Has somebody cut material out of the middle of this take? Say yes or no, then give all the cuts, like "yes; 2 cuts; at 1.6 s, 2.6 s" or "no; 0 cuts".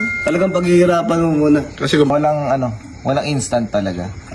yes; 1 cut; at 2.1 s